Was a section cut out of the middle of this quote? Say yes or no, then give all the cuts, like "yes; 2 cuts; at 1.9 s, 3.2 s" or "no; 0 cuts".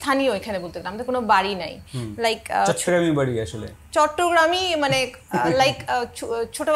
no; 0 cuts